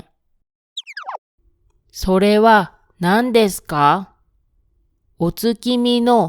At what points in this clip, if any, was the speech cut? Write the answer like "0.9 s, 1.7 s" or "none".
1.0 s